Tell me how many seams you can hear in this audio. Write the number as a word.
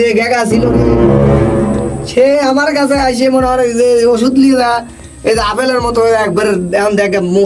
zero